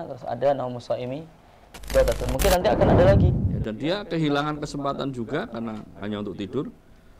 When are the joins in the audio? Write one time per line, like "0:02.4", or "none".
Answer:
0:03.3